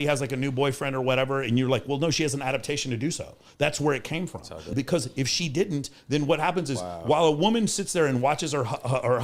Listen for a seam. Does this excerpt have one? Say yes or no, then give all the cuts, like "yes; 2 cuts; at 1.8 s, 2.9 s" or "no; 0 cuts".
yes; 1 cut; at 4.7 s